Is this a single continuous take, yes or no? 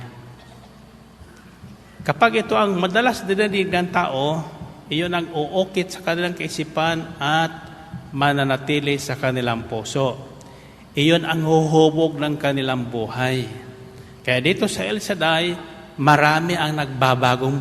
yes